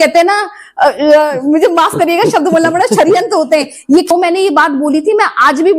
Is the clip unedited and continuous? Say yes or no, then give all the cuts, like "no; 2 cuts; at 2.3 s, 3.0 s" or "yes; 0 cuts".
no; 1 cut; at 4.1 s